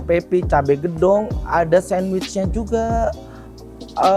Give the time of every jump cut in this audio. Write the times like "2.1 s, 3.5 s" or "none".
none